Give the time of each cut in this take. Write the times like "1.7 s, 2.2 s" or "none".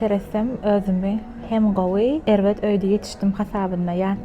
2.2 s